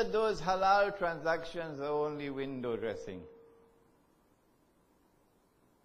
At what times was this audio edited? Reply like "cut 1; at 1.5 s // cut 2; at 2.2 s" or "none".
cut 1; at 3.7 s